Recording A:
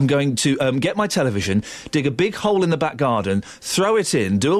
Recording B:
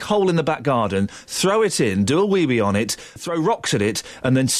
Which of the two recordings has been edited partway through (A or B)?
B